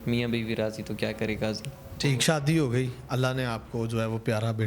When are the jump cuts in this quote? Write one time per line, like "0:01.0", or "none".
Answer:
none